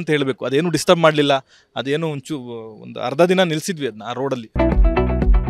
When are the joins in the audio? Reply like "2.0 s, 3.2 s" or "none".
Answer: 4.5 s